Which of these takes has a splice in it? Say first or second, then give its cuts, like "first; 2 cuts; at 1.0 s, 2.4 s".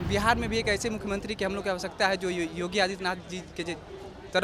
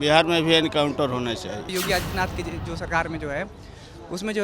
second; 1 cut; at 1.7 s